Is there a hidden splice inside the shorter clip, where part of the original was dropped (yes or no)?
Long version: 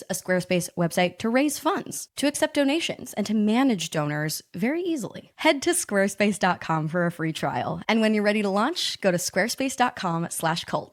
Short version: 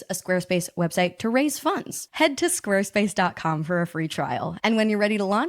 yes